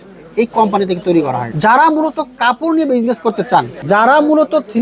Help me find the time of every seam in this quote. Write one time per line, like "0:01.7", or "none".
0:01.5
0:03.8